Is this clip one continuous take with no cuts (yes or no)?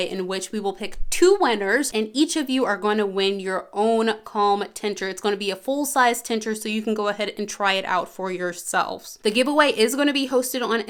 yes